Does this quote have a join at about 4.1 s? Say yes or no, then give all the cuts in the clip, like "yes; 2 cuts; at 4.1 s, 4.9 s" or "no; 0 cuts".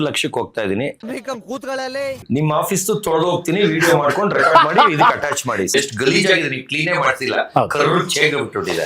no; 2 cuts; at 2.1 s, 5.7 s